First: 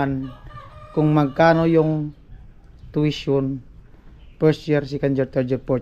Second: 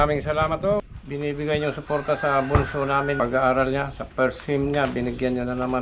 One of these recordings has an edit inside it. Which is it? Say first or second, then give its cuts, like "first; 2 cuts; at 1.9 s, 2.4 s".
second; 2 cuts; at 1.0 s, 3.2 s